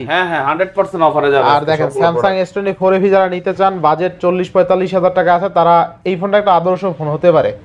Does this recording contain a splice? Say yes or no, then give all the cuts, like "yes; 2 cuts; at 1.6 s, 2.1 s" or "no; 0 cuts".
no; 0 cuts